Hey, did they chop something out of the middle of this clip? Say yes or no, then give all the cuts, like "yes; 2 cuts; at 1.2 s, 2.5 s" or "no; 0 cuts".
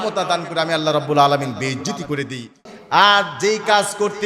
yes; 1 cut; at 2.7 s